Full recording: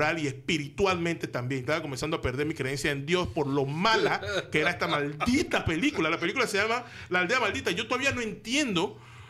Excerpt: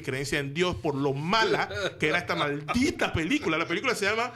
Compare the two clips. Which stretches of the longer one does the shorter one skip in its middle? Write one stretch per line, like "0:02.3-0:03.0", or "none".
none